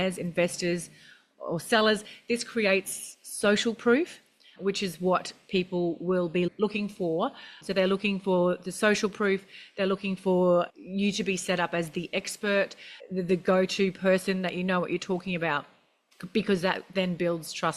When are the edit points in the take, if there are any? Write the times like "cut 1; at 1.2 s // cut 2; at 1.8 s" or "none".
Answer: cut 1; at 10.7 s